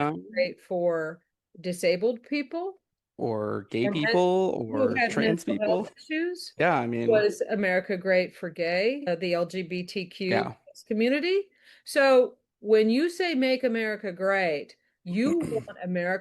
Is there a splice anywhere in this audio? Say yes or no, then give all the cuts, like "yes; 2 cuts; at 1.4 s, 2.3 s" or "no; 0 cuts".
yes; 1 cut; at 9.0 s